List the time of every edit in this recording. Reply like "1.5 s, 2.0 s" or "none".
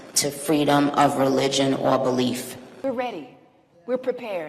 2.6 s